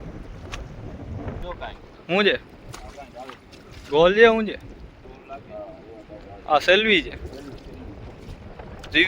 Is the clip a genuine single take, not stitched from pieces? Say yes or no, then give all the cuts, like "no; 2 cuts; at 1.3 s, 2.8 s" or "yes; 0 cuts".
no; 1 cut; at 1.4 s